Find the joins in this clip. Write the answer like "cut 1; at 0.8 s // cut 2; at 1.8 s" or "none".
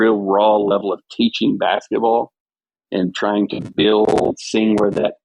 none